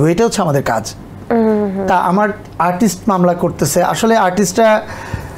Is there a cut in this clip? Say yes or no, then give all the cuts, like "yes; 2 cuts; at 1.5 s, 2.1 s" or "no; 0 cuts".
no; 0 cuts